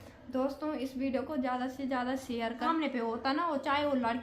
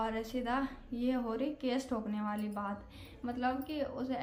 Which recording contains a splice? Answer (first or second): first